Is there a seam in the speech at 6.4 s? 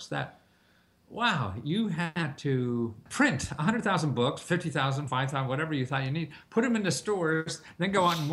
no; 1 cut; at 3.0 s

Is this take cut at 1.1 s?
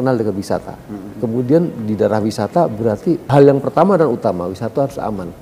yes; 2 cuts; at 1.1 s, 3.3 s

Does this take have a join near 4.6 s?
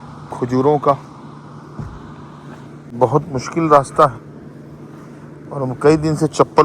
no; 1 cut; at 2.9 s

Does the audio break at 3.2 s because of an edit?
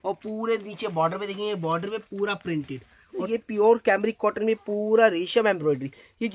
yes; 1 cut; at 3.2 s

